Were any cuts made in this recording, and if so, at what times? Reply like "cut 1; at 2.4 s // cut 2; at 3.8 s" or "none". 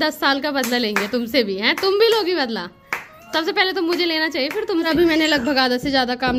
cut 1; at 4.9 s